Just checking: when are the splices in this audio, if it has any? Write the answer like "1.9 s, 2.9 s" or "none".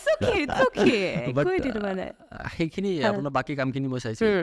none

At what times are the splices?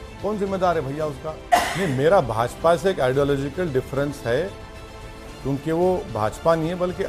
1.3 s

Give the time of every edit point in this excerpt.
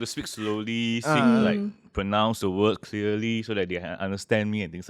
none

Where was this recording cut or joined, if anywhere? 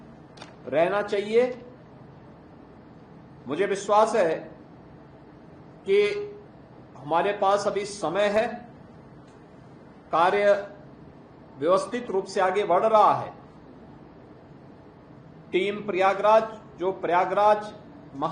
none

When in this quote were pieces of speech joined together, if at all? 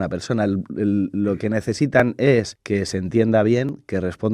2.6 s

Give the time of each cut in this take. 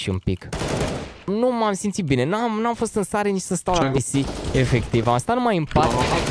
1.1 s

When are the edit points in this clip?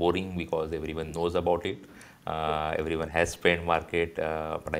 none

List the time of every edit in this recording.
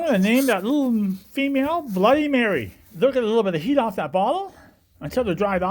2.8 s

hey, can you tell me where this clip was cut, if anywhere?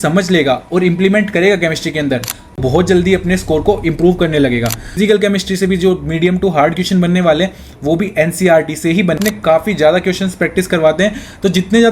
5.0 s, 9.2 s

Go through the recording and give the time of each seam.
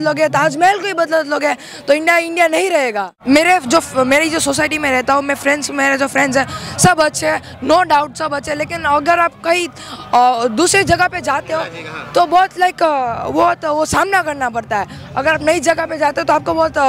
3.1 s

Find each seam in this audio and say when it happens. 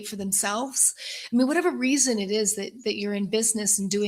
none

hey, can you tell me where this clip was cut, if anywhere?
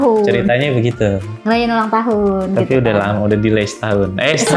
none

